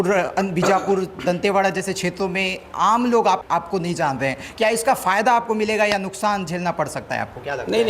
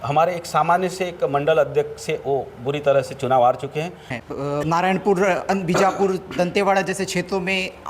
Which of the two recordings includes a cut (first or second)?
second